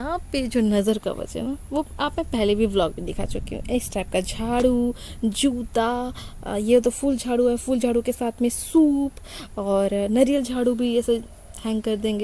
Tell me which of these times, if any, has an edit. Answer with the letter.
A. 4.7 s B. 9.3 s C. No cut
C